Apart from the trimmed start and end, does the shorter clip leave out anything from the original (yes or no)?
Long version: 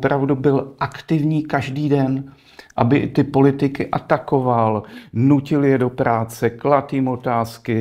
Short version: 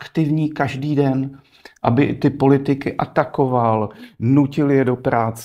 no